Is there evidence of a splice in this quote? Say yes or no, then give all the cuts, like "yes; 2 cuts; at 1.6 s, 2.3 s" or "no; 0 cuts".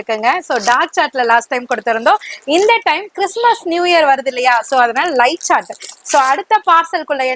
no; 0 cuts